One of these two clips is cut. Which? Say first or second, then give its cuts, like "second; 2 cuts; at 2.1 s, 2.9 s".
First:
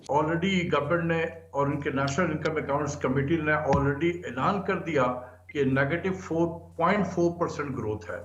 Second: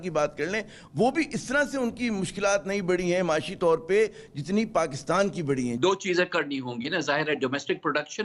second; 1 cut; at 5.8 s